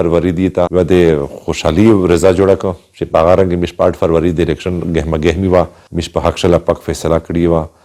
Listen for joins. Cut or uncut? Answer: uncut